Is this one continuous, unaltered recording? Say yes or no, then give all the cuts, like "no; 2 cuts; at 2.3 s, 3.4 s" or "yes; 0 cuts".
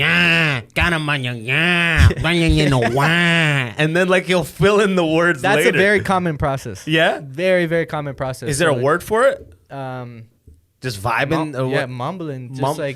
yes; 0 cuts